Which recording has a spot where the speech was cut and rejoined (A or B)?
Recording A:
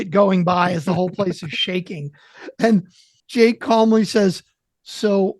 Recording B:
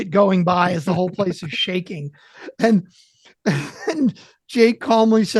A